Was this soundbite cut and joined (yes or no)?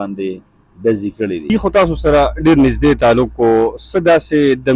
yes